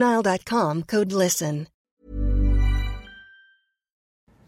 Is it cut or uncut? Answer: cut